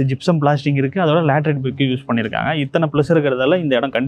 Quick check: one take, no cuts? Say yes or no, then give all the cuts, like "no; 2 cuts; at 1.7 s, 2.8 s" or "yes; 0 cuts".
yes; 0 cuts